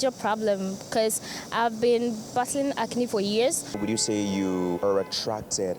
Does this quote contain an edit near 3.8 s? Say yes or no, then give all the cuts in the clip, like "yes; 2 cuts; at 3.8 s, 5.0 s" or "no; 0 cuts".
yes; 2 cuts; at 3.8 s, 4.8 s